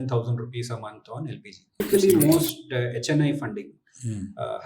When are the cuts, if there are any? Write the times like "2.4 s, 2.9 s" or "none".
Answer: 1.8 s